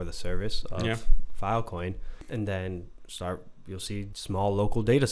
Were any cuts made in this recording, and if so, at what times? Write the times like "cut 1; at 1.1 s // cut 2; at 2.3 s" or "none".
cut 1; at 2.1 s // cut 2; at 4.2 s